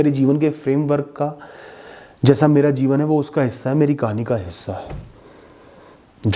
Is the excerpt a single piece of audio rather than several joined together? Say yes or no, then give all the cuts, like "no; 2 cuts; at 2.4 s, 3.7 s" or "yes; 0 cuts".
yes; 0 cuts